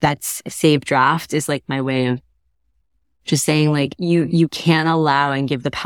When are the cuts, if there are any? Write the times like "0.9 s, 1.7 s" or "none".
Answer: 3.9 s